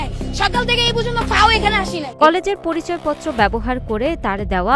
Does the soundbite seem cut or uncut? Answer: cut